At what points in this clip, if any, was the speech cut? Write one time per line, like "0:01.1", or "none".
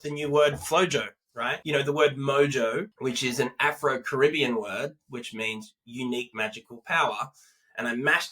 0:01.5
0:02.9